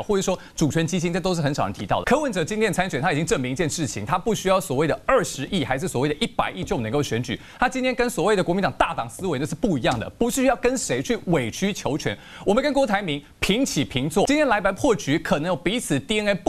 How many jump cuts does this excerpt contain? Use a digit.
2